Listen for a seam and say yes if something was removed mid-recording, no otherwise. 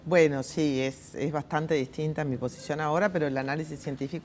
yes